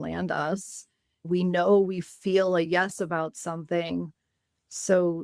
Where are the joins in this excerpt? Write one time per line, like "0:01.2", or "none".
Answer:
0:01.3